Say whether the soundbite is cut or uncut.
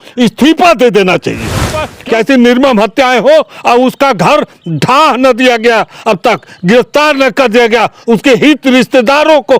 cut